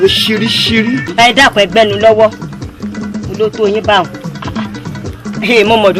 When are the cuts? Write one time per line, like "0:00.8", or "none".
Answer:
0:01.1